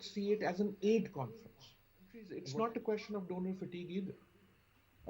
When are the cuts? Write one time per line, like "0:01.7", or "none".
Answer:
0:02.4